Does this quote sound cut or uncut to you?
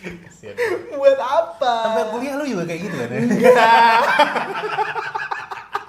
uncut